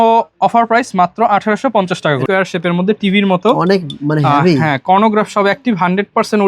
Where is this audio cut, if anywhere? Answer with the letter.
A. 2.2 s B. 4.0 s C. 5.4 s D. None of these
A